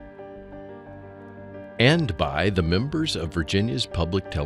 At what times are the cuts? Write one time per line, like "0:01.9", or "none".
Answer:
0:01.8